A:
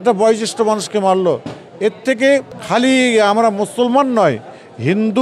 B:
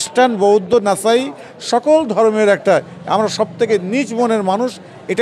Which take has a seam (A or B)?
A